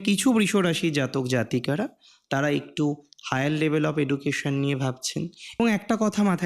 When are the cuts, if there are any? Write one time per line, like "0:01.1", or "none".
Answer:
0:05.5